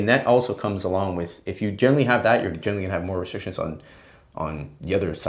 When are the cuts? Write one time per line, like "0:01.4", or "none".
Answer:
none